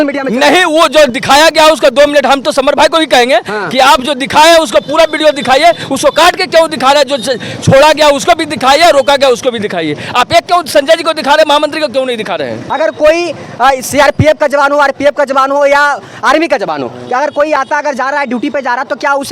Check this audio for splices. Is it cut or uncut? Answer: cut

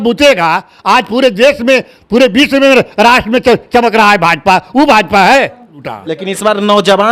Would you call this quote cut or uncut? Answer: cut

